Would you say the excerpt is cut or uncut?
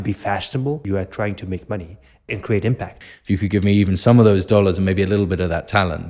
cut